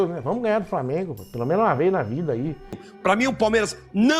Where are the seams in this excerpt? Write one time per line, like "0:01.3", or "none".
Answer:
0:02.8

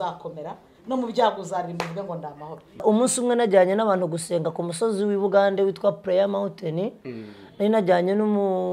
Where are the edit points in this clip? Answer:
0:02.8

